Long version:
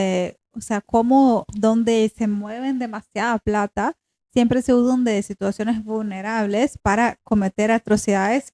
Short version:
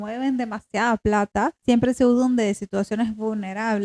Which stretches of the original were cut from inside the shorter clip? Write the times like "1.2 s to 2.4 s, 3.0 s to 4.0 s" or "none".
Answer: 4.0 s to 4.3 s